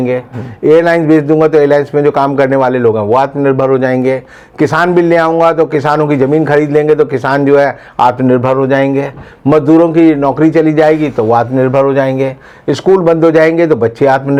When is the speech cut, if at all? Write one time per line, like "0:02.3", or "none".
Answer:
none

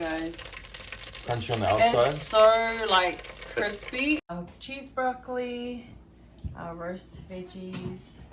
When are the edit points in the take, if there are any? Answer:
0:04.2

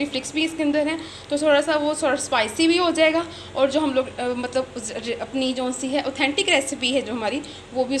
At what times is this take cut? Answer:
none

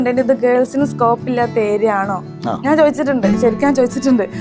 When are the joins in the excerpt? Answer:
none

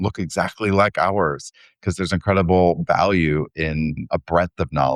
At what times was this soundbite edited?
0:04.0

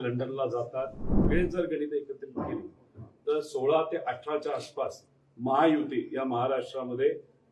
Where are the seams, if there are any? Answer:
0:01.2

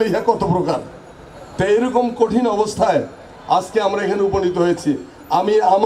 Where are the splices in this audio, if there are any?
none

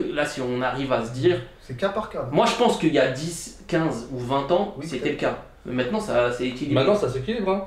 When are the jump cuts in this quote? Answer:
none

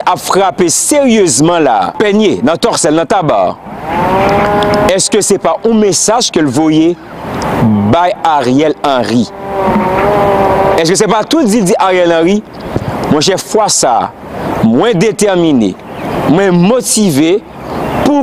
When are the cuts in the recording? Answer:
0:01.9

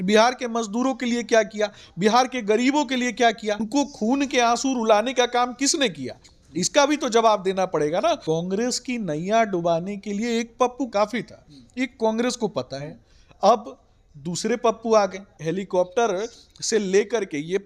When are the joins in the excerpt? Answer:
0:03.6
0:08.2
0:10.9
0:15.3

